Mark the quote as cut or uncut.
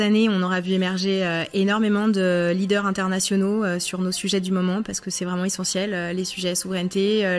uncut